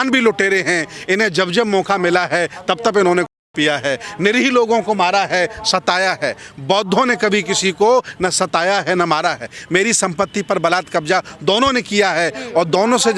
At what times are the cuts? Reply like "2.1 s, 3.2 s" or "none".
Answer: none